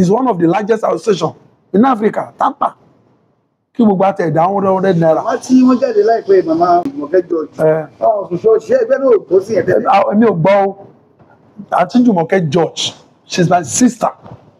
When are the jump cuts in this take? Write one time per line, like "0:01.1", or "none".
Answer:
0:06.9